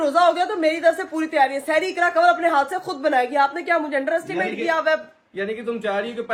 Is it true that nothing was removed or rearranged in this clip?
yes; 0 cuts

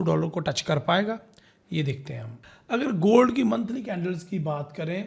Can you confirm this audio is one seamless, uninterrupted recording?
yes; 0 cuts

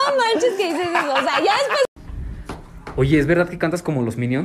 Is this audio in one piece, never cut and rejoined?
no; 1 cut; at 2.1 s

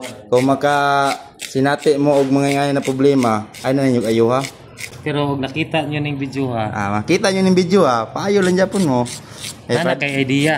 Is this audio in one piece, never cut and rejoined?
yes; 0 cuts

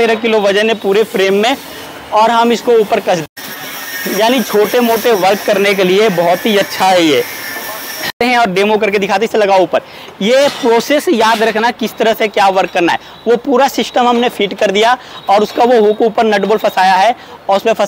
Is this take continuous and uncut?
no; 2 cuts; at 3.2 s, 8.2 s

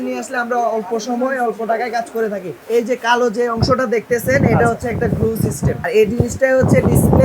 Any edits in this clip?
yes; 2 cuts; at 2.5 s, 5.8 s

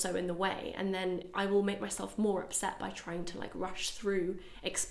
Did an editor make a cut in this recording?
no; 0 cuts

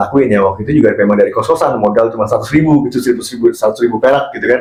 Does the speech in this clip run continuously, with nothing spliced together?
yes; 0 cuts

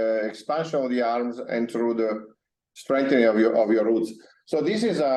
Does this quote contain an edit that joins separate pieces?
no; 0 cuts

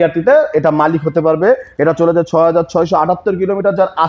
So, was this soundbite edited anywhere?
no; 0 cuts

